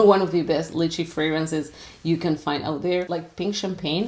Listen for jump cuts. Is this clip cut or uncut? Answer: cut